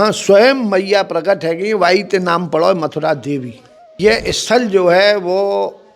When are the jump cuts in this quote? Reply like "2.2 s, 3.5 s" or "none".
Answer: 4.0 s